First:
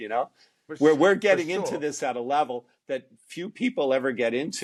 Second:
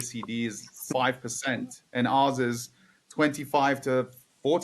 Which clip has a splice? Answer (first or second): second